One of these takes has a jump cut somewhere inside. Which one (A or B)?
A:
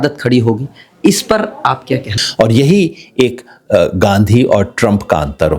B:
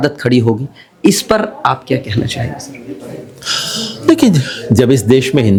A